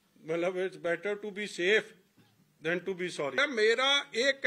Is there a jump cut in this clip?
yes; 1 cut; at 3.4 s

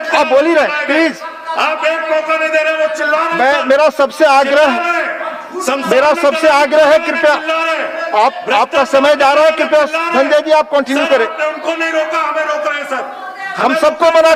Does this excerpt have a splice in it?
no; 0 cuts

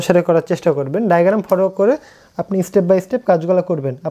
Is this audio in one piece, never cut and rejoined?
yes; 0 cuts

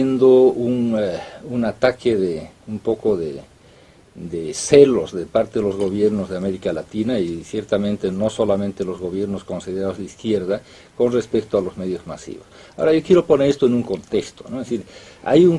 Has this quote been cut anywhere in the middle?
no; 0 cuts

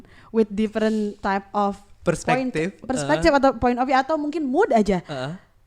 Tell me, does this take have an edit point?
yes; 1 cut; at 1.2 s

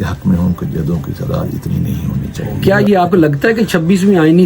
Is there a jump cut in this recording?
yes; 1 cut; at 2.4 s

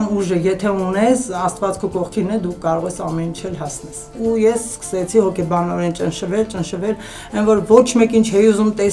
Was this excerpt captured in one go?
no; 1 cut; at 4.1 s

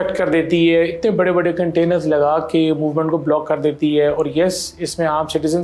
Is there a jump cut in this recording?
no; 0 cuts

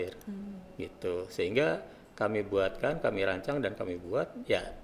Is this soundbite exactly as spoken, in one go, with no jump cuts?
yes; 0 cuts

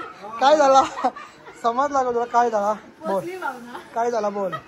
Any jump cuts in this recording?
no; 0 cuts

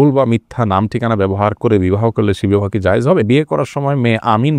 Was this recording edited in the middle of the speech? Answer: yes; 1 cut; at 3.2 s

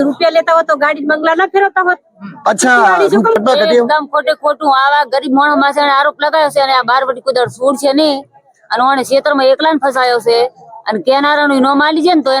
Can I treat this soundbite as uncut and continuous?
no; 1 cut; at 3.3 s

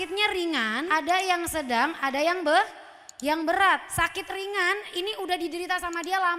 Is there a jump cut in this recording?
no; 0 cuts

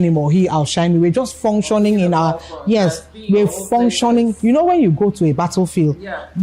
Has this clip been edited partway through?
no; 0 cuts

